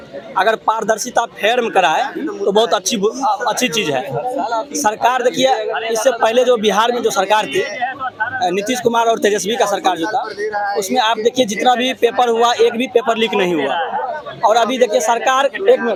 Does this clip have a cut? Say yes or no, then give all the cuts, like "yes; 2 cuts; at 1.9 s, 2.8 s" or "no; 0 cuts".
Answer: no; 0 cuts